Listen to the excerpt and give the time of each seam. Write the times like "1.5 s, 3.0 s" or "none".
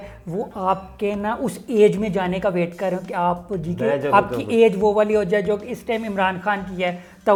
none